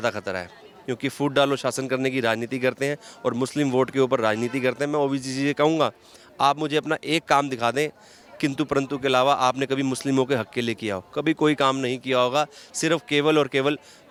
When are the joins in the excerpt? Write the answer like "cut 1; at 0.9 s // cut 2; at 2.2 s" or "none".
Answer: none